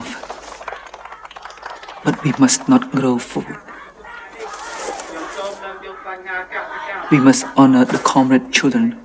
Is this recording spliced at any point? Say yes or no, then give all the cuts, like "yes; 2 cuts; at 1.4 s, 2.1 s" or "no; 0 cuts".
no; 0 cuts